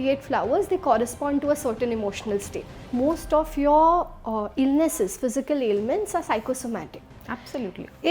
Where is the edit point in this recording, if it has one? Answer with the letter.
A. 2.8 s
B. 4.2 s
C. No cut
A